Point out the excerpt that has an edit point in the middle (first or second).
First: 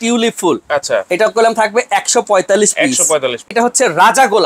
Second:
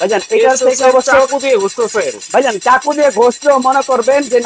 first